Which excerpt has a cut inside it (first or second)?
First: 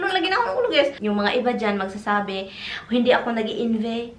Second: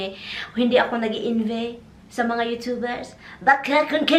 first